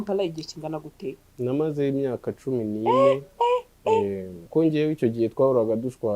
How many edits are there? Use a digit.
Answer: 1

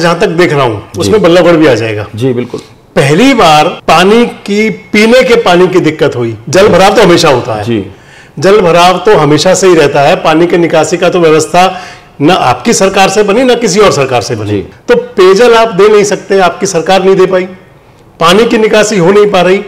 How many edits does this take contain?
2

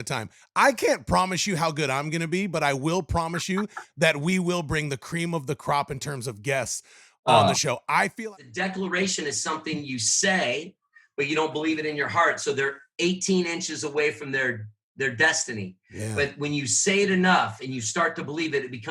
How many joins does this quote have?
1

